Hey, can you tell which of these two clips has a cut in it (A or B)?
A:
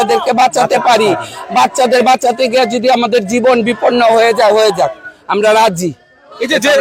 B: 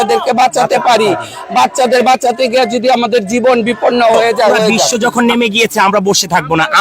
B